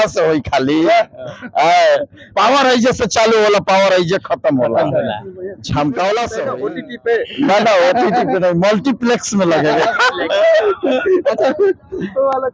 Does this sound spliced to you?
yes; 1 cut; at 6.5 s

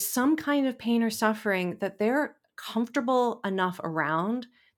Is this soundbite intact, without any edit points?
yes; 0 cuts

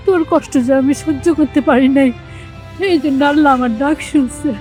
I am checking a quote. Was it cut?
no; 0 cuts

